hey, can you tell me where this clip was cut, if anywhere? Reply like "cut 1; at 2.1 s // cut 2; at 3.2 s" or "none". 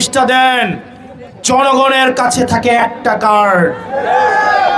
none